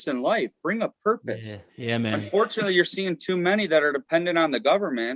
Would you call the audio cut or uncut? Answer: uncut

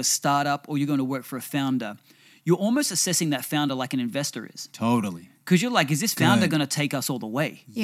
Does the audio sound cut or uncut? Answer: uncut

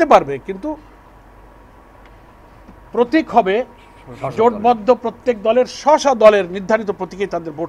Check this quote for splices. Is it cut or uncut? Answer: uncut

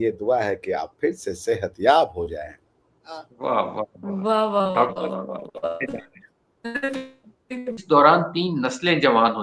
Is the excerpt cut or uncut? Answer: cut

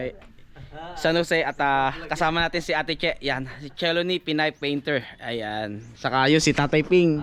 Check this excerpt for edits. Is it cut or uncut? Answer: uncut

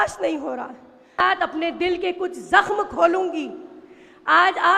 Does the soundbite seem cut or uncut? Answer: cut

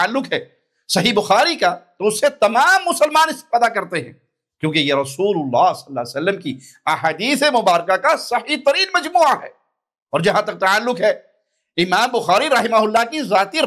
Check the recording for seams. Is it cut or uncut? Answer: uncut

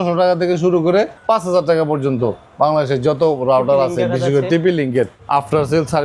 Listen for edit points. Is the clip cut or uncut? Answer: cut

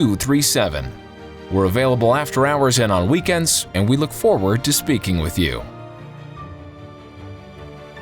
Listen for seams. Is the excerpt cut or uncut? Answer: cut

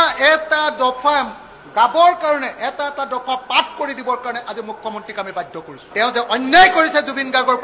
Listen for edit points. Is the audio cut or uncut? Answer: cut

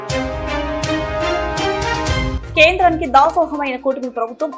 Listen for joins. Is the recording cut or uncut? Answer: cut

